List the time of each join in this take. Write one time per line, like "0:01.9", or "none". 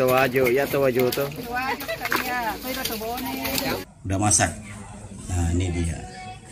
0:03.8